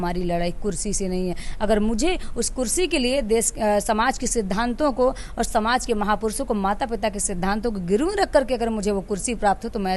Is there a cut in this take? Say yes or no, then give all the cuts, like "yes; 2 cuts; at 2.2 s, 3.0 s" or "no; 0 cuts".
no; 0 cuts